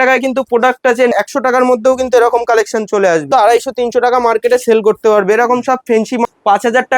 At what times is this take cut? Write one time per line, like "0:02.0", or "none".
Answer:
0:01.1
0:03.2
0:06.2